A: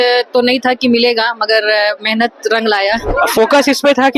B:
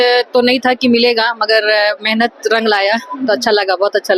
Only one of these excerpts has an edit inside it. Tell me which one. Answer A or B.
A